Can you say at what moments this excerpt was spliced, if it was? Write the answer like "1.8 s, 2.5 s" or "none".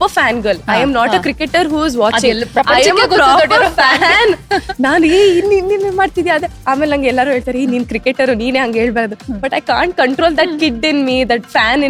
none

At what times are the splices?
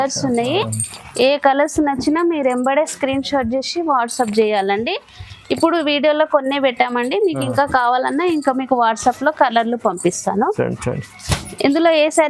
none

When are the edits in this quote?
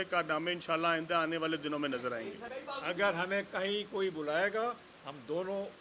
2.4 s

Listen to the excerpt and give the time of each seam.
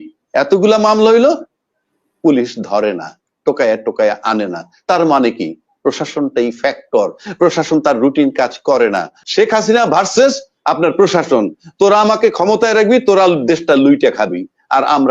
9.2 s

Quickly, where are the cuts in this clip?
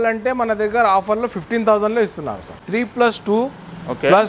2.5 s

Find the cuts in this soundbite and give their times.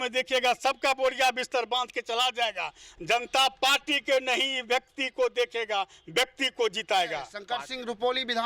7.4 s

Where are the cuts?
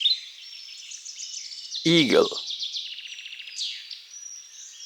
1.4 s, 2.8 s

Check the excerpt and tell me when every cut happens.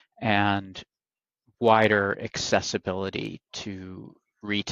none

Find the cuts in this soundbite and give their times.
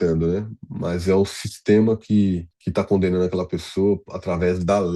2.5 s

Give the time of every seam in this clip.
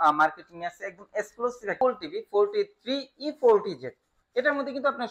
1.8 s

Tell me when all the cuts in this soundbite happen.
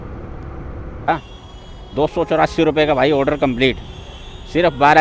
1.1 s

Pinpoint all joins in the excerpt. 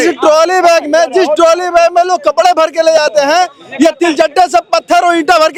none

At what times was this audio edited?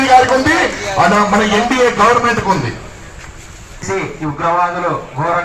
3.8 s

